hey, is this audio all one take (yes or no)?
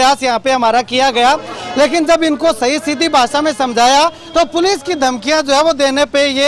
yes